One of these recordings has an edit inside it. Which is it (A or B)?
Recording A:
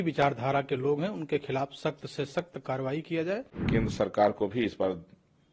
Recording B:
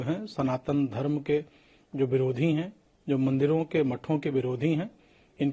A